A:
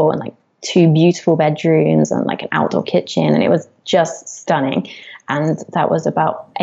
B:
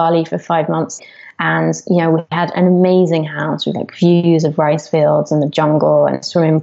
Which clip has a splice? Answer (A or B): B